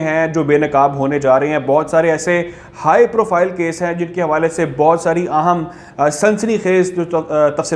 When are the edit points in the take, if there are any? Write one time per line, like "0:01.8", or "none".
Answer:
none